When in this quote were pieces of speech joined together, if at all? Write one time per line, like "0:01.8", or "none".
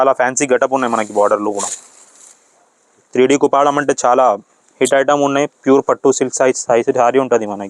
0:03.0